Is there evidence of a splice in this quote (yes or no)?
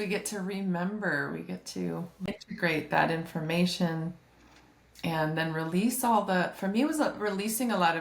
yes